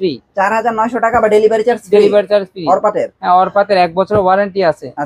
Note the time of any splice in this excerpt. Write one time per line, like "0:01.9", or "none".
none